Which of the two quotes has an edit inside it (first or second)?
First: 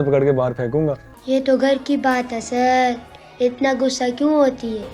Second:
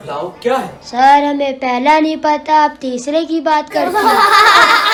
first